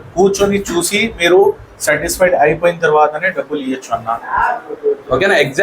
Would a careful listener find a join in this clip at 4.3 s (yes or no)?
no